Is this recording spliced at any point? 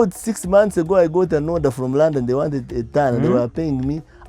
no; 0 cuts

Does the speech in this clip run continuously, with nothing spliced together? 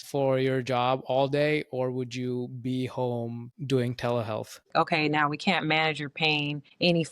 no; 1 cut; at 4.7 s

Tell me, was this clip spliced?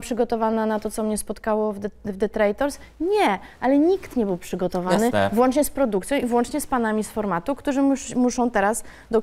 no; 0 cuts

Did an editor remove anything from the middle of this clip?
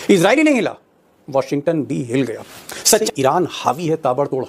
yes; 1 cut; at 3.0 s

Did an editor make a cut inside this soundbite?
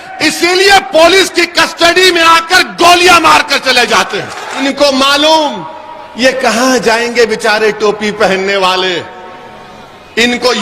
yes; 1 cut; at 4.6 s

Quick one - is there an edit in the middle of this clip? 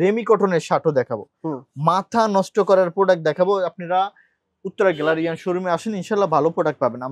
no; 0 cuts

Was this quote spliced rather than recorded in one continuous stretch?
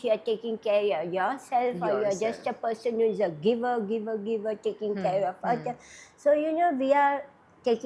no; 0 cuts

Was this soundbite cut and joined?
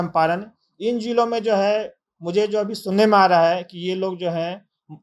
no; 0 cuts

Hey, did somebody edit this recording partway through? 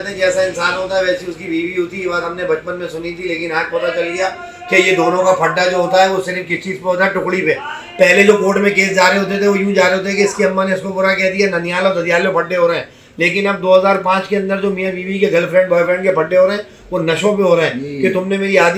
no; 0 cuts

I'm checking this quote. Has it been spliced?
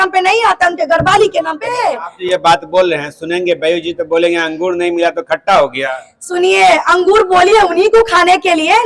yes; 1 cut; at 1.8 s

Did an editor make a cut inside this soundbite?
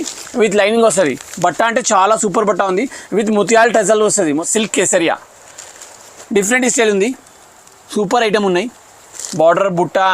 yes; 1 cut; at 4.4 s

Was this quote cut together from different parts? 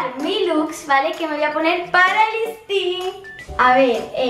yes; 1 cut; at 3.2 s

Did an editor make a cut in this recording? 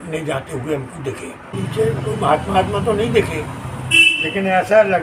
yes; 1 cut; at 1.5 s

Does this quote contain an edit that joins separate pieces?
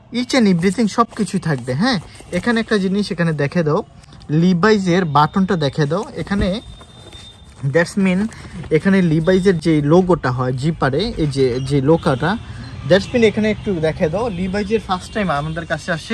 no; 0 cuts

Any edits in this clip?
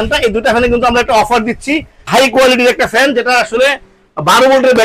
yes; 1 cut; at 2.1 s

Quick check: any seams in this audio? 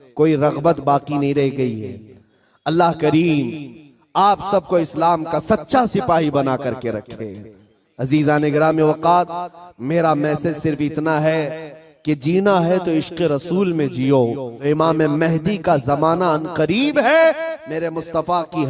yes; 1 cut; at 14.5 s

